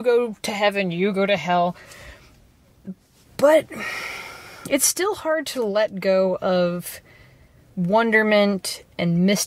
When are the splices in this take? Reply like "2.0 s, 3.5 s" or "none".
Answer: none